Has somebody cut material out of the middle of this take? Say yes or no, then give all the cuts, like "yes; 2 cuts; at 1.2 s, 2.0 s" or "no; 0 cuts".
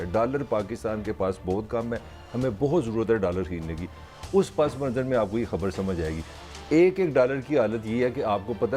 no; 0 cuts